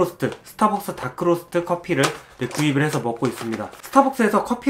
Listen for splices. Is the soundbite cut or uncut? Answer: uncut